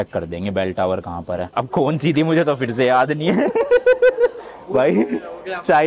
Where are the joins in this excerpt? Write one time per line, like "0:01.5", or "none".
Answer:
0:01.5